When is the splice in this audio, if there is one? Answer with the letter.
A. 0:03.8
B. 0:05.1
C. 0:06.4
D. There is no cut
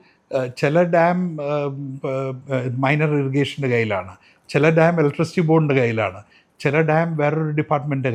D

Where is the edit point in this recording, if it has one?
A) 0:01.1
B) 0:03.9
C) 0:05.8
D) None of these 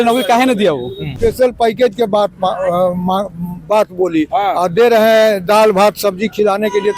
A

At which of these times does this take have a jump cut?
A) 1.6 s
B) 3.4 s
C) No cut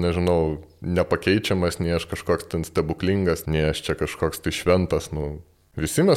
B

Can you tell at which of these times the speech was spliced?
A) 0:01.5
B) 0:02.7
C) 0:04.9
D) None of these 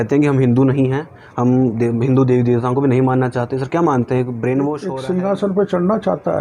C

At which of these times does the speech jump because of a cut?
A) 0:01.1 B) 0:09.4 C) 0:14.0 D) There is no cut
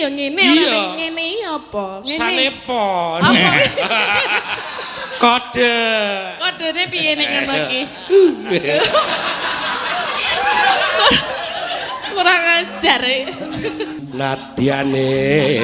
C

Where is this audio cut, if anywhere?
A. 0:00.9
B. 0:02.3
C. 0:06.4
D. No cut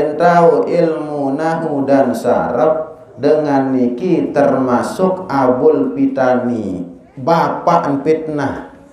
D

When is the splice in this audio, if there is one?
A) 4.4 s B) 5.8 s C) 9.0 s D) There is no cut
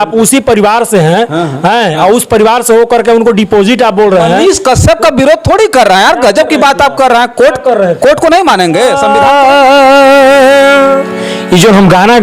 C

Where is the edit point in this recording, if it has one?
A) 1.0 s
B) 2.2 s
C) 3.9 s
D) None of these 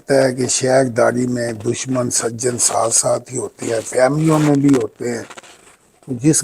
D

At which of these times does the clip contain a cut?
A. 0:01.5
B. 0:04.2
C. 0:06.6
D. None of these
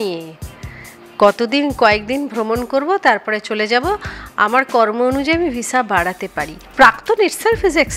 C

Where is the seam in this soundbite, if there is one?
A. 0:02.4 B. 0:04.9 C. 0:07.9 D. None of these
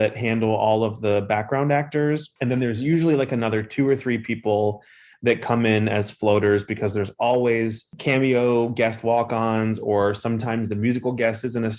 D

